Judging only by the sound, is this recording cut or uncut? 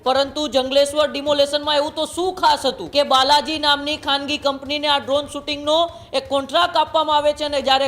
cut